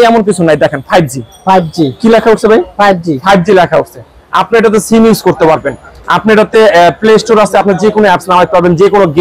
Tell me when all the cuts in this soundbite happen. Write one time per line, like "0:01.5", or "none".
none